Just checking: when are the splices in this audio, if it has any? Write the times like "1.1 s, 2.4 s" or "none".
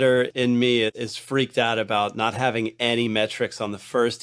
1.0 s